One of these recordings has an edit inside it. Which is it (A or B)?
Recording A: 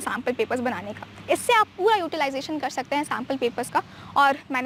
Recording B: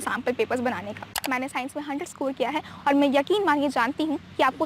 B